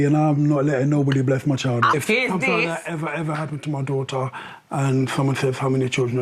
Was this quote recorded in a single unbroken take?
no; 1 cut; at 1.9 s

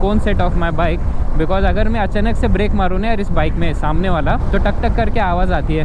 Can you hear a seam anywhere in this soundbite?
no; 0 cuts

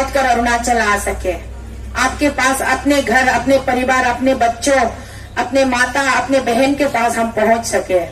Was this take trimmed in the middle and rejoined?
no; 0 cuts

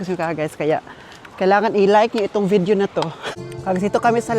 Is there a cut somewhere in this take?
yes; 1 cut; at 3.2 s

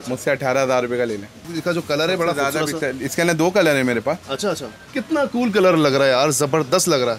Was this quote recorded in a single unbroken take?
no; 2 cuts; at 1.4 s, 4.8 s

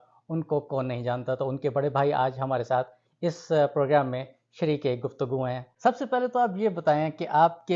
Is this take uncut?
no; 1 cut; at 5.7 s

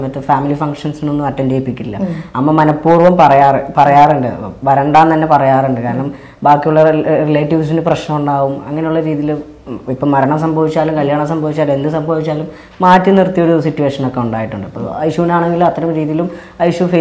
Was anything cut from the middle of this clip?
no; 0 cuts

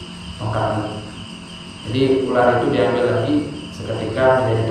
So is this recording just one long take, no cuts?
yes; 0 cuts

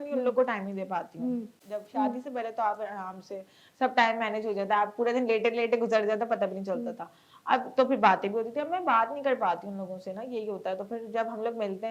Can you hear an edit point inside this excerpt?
yes; 1 cut; at 1.6 s

